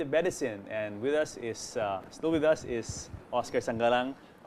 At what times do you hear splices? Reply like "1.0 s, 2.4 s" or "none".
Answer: none

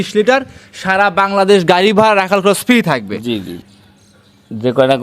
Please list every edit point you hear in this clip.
3.6 s

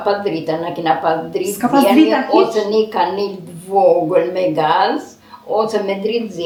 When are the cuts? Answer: none

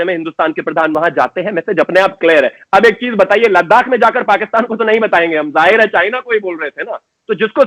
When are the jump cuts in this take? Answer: 0.9 s

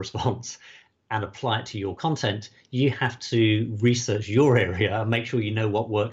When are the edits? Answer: none

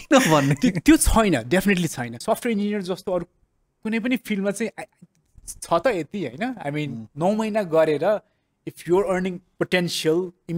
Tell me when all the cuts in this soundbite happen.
2.1 s

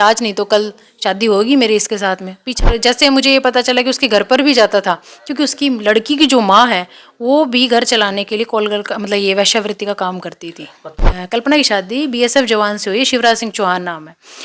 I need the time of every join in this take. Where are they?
2.7 s, 11.0 s

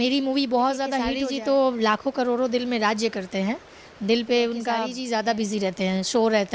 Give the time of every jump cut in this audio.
1.1 s, 4.9 s

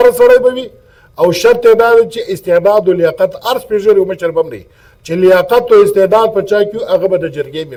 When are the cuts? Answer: none

